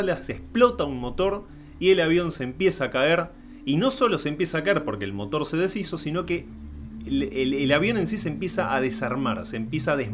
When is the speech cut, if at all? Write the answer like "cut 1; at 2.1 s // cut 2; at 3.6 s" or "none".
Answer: none